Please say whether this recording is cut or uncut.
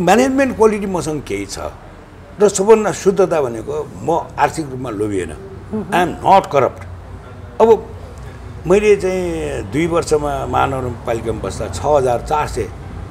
uncut